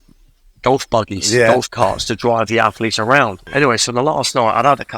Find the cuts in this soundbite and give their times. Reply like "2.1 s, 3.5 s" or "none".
3.4 s